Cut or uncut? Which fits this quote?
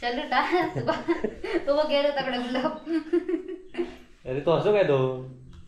uncut